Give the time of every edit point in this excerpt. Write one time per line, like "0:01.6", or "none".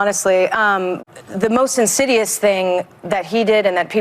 0:01.0

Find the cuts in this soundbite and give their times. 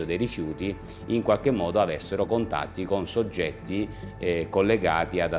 none

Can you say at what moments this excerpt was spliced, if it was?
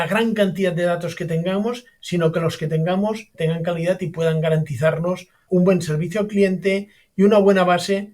0:03.3

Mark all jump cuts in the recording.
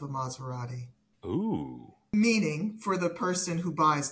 0:02.1

